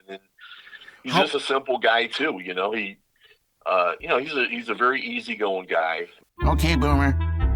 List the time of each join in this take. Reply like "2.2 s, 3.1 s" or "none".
6.2 s